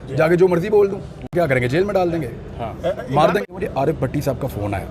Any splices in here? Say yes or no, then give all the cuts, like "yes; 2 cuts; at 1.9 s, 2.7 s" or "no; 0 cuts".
yes; 2 cuts; at 1.3 s, 3.4 s